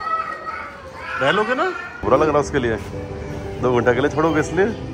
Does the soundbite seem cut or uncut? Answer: cut